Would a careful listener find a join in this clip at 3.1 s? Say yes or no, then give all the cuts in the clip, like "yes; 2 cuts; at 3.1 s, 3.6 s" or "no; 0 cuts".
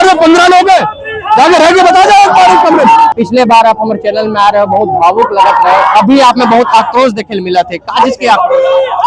no; 0 cuts